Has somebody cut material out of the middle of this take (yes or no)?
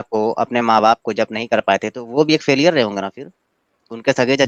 no